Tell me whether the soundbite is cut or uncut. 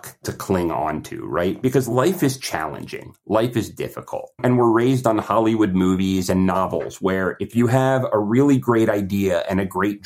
cut